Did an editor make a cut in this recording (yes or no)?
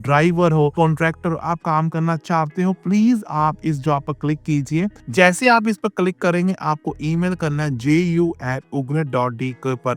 no